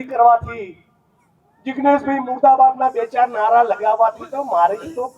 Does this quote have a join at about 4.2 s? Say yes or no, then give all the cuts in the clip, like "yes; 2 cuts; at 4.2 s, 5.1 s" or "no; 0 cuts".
no; 0 cuts